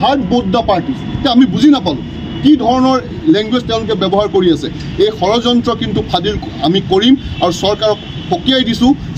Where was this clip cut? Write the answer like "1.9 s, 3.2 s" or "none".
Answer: none